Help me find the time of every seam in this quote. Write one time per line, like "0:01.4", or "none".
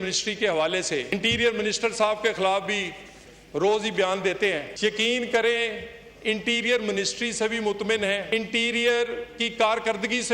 0:01.1
0:04.7
0:08.2